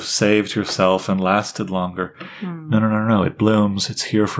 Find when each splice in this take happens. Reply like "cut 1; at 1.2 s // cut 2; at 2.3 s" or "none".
none